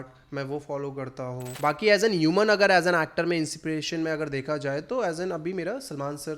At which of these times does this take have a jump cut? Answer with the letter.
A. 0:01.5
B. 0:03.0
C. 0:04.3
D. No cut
A